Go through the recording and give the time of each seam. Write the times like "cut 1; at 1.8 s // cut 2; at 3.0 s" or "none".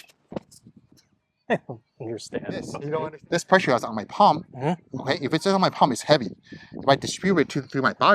cut 1; at 2.8 s